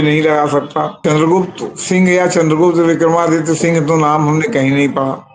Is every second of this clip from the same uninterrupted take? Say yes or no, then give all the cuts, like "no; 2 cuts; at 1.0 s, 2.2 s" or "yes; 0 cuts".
no; 1 cut; at 1.0 s